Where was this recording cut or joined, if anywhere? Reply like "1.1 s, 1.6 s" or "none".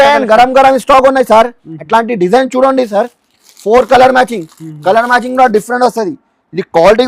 none